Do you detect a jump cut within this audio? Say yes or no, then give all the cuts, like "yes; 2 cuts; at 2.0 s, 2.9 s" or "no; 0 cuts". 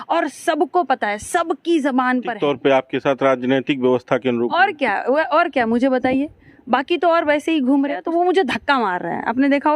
yes; 2 cuts; at 2.3 s, 8.0 s